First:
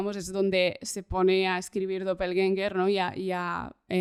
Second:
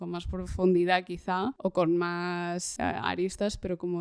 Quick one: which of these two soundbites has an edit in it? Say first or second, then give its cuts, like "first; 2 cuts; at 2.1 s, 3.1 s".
second; 2 cuts; at 1.5 s, 2.7 s